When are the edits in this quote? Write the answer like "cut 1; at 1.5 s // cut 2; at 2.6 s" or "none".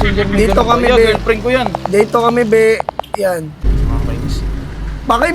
cut 1; at 3.7 s